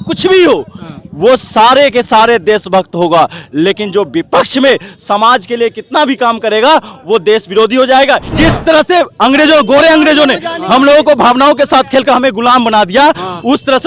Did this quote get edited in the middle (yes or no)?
yes